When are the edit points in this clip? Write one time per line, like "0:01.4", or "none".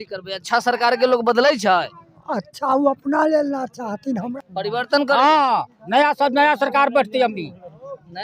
0:04.4